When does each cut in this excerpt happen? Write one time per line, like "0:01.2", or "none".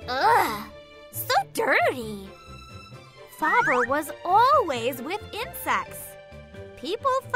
none

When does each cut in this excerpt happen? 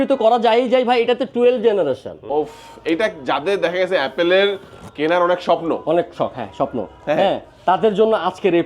0:02.3

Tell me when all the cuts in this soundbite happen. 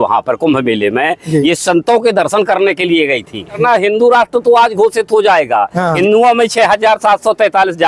0:03.6
0:05.9

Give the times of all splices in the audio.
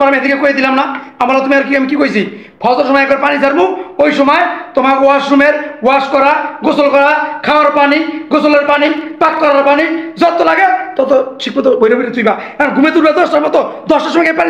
none

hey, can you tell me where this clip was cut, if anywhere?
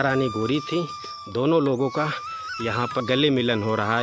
0:03.0

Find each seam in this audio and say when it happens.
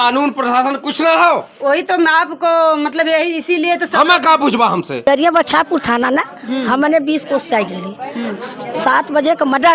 0:05.0

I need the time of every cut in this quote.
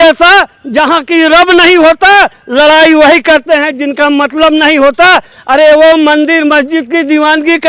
none

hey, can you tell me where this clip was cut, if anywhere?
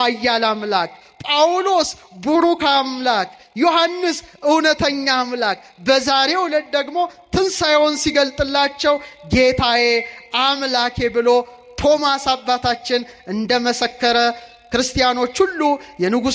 none

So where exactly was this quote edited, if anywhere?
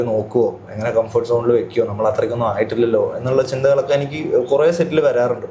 none

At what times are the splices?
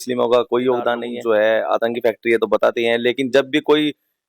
0:01.1

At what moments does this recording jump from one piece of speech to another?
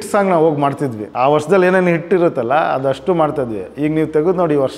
0:01.0

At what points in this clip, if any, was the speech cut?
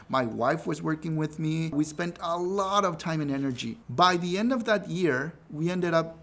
0:01.7
0:03.7

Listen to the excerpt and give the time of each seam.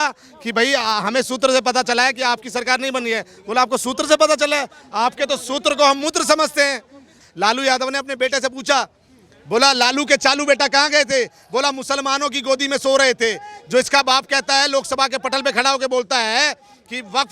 0:07.2

